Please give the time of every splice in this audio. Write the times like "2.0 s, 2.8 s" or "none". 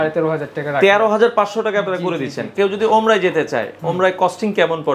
2.5 s